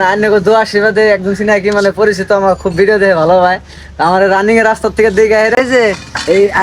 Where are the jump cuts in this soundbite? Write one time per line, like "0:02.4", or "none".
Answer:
0:05.5